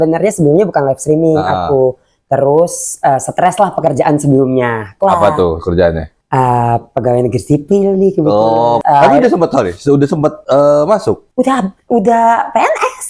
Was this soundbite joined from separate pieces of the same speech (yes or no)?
yes